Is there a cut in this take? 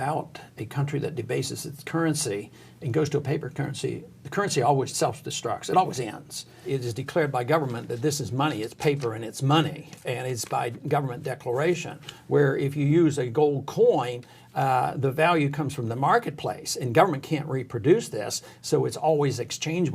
yes; 2 cuts; at 4.9 s, 6.6 s

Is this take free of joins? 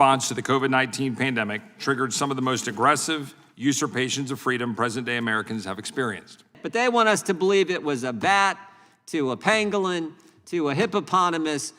no; 1 cut; at 6.6 s

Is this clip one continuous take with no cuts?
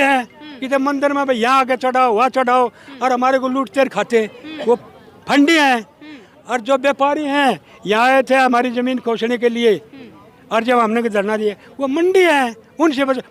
yes; 0 cuts

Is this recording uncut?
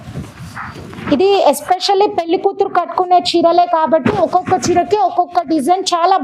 yes; 0 cuts

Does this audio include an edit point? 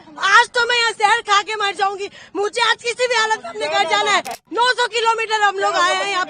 yes; 1 cut; at 4.4 s

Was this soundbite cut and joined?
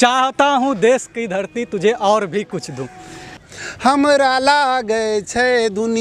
yes; 1 cut; at 3.4 s

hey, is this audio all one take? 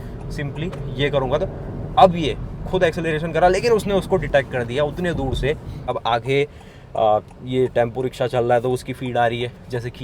no; 1 cut; at 5.9 s

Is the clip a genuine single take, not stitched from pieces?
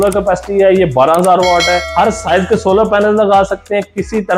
no; 1 cut; at 1.8 s

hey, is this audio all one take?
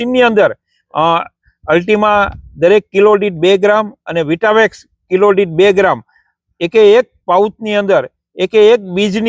yes; 0 cuts

